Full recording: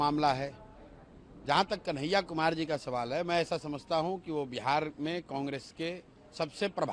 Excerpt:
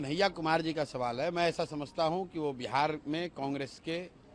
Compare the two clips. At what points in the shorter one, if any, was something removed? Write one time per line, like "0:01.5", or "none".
none